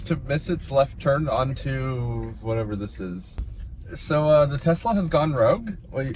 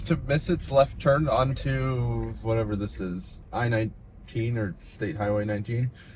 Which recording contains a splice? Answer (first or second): first